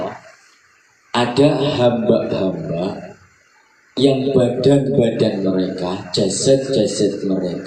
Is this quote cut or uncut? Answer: uncut